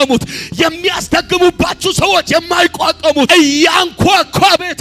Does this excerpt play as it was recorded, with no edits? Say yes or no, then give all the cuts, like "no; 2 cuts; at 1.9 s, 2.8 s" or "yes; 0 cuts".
no; 1 cut; at 3.3 s